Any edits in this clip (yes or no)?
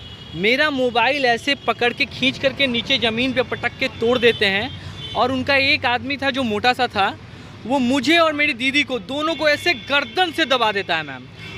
no